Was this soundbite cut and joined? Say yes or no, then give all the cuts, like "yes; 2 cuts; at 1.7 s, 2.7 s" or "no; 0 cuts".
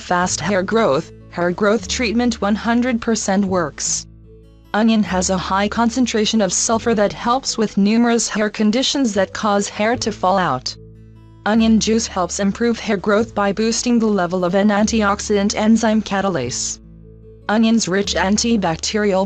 yes; 1 cut; at 14.9 s